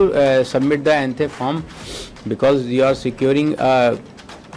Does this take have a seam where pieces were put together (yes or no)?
no